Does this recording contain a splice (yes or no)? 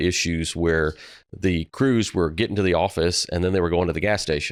no